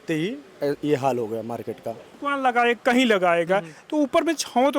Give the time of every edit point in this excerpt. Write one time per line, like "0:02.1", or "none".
0:02.1